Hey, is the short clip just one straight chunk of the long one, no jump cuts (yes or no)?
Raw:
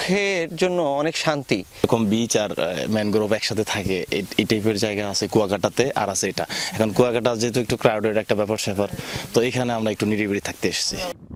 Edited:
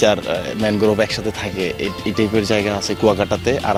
yes